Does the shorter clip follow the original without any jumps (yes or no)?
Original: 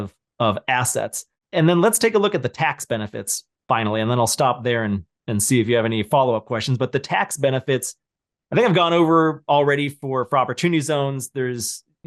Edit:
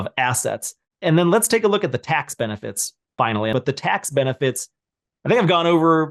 no